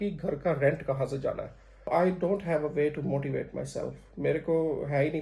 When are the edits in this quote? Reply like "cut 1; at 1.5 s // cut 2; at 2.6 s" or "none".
cut 1; at 1.9 s